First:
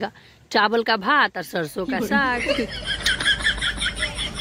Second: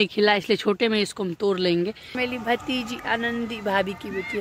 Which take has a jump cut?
second; 1 cut; at 2.1 s

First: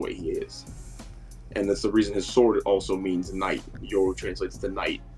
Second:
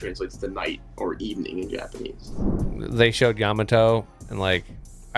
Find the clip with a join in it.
second; 1 cut; at 2.5 s

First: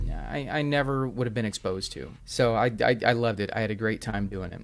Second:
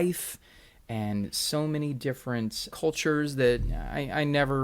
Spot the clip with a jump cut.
second; 1 cut; at 2.6 s

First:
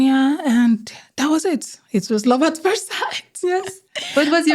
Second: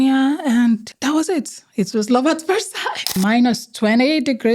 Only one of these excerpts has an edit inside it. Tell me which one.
second; 2 cuts; at 0.9 s, 3.1 s

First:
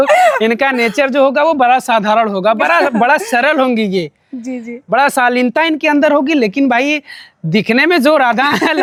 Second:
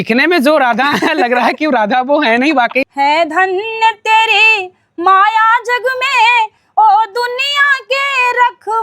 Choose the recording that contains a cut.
second; 1 cut; at 2.8 s

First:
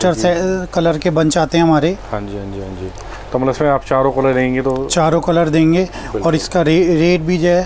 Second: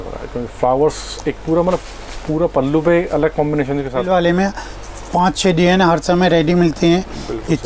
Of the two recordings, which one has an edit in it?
second; 1 cut; at 4.1 s

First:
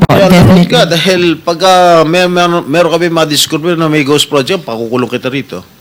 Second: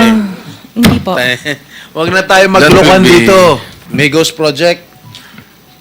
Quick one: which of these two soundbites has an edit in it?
second; 1 cut; at 3.9 s

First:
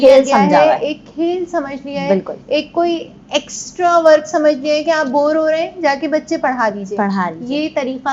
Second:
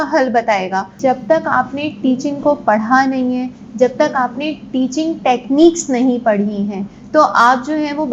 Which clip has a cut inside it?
second; 1 cut; at 0.9 s

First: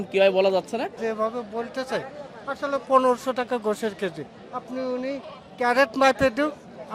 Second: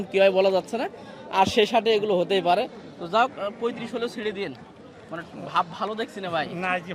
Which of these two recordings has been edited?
first; 1 cut; at 1.0 s

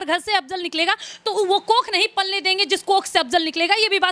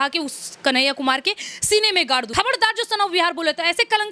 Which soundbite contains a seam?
second; 1 cut; at 2.3 s

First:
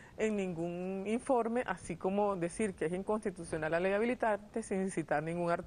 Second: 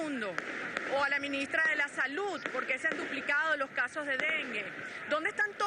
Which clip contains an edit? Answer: first; 1 cut; at 1.0 s

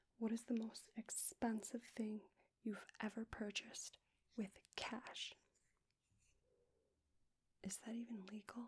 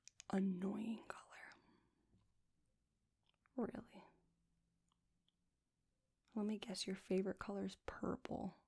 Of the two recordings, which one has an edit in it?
first; 1 cut; at 7.2 s

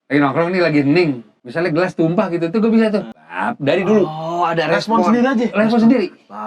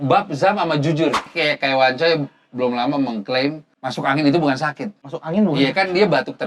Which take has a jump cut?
second; 1 cut; at 1.3 s

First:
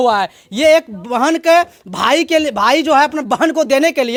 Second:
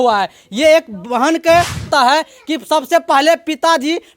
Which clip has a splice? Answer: second; 1 cut; at 1.9 s

